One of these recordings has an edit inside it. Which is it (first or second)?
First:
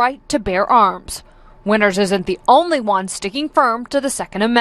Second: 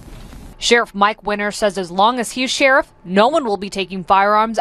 second